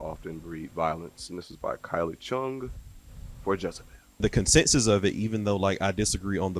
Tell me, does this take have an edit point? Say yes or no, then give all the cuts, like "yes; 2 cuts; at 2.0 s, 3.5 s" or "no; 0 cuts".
yes; 1 cut; at 4.2 s